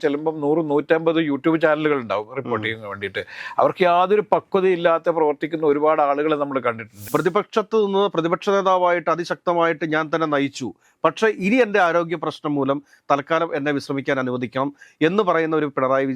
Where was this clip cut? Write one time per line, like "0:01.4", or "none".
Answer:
0:06.9